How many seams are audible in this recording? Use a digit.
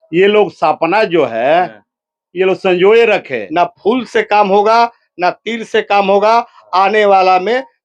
1